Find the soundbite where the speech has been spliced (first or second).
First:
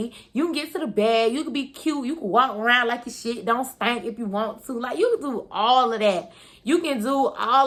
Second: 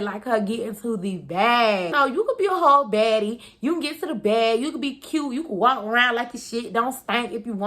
second